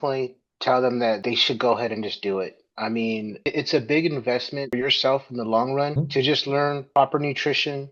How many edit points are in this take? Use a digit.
3